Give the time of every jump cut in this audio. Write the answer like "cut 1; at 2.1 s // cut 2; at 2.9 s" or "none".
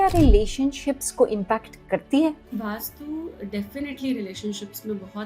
cut 1; at 2.4 s